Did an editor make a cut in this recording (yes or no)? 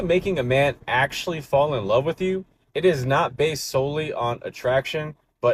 no